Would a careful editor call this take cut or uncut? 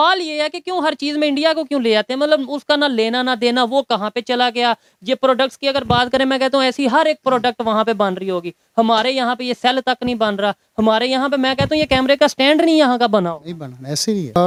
uncut